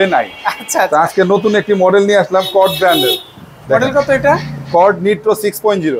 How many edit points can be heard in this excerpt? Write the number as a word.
zero